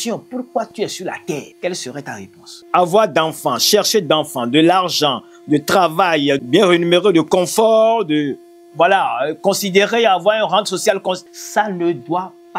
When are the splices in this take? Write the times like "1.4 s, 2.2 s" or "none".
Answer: 1.5 s, 2.5 s, 6.4 s, 11.3 s